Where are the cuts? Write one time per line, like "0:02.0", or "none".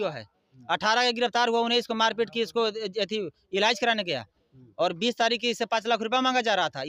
none